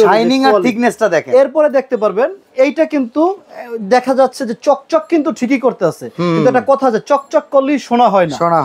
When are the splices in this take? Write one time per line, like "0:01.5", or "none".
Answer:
none